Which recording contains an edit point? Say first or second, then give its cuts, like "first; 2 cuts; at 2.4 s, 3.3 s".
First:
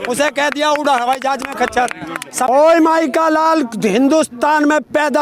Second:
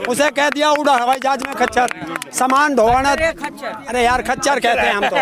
first; 1 cut; at 2.5 s